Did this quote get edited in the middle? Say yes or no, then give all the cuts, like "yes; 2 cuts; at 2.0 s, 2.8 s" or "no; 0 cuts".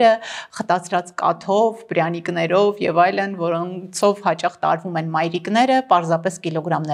no; 0 cuts